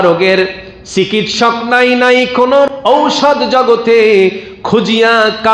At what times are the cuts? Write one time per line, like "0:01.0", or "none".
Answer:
0:02.7